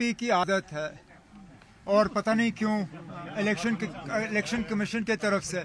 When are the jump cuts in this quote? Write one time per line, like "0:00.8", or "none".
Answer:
none